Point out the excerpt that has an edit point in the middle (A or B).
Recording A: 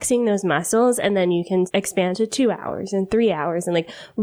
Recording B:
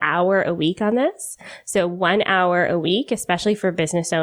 A